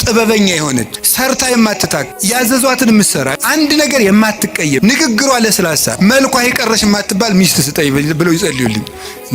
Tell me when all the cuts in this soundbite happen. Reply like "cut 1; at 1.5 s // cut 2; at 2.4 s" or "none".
cut 1; at 1.0 s // cut 2; at 2.1 s // cut 3; at 3.4 s // cut 4; at 4.8 s // cut 5; at 6.0 s